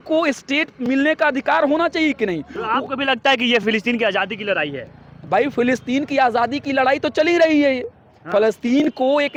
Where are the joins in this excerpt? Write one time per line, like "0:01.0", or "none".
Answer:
none